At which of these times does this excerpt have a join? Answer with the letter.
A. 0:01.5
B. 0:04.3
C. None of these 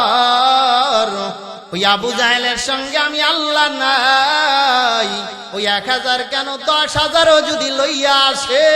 A